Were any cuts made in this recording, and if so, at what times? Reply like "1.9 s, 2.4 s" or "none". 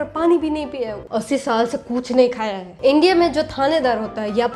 1.0 s, 2.8 s